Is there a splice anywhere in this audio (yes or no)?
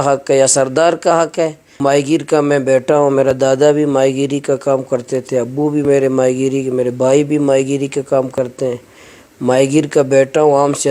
yes